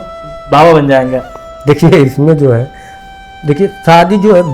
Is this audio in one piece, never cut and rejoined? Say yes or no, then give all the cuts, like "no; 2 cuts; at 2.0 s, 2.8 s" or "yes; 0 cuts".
yes; 0 cuts